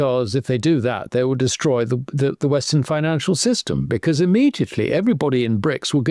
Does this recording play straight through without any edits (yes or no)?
yes